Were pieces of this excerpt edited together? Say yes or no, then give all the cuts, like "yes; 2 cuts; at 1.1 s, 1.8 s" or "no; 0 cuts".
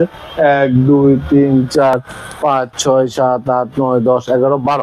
no; 0 cuts